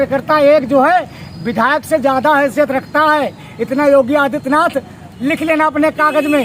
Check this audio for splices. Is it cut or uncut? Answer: uncut